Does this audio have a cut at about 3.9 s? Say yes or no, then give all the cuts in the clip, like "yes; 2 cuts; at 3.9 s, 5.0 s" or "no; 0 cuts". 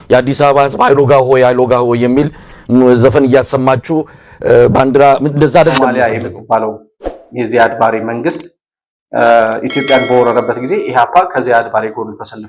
no; 1 cut; at 5.9 s